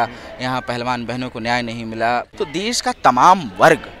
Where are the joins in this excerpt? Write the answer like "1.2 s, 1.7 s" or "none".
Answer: 2.3 s